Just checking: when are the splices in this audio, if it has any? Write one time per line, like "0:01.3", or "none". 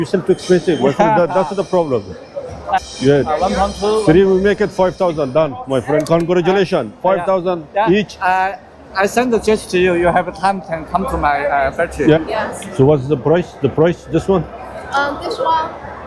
0:02.8
0:12.2